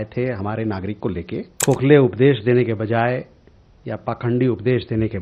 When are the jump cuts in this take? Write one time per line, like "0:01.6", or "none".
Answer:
0:01.5